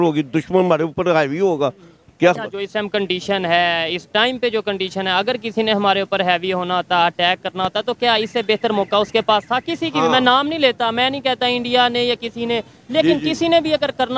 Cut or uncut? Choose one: uncut